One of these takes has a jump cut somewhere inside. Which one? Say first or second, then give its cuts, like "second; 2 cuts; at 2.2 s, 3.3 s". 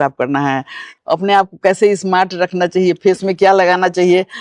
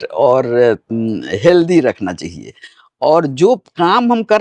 first; 1 cut; at 0.9 s